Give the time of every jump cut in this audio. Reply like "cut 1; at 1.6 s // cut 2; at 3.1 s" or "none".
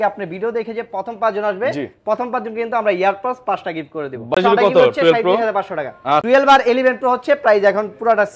cut 1; at 4.3 s // cut 2; at 6.3 s